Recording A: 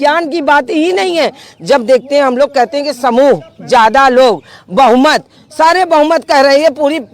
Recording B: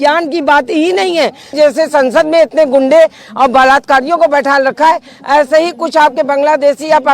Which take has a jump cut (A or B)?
B